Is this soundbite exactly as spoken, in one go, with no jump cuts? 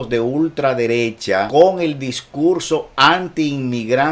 no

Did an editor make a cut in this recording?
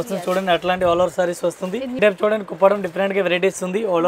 yes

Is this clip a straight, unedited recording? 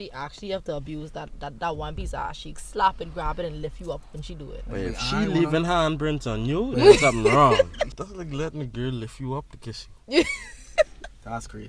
no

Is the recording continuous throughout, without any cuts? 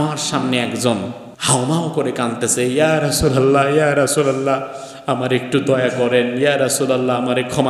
no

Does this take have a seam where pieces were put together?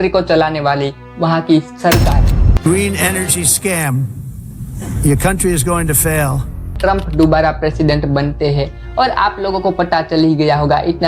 yes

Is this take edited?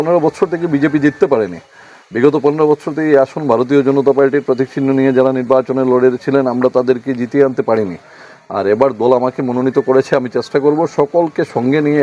no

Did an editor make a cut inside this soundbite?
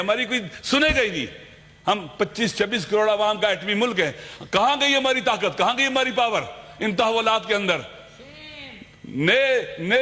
no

